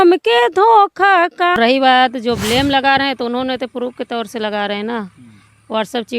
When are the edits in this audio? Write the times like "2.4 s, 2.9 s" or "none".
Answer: 1.6 s